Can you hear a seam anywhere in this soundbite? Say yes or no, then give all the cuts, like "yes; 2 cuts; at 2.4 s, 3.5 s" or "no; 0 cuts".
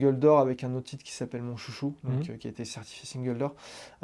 no; 0 cuts